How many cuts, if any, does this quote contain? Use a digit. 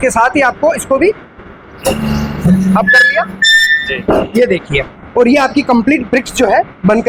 0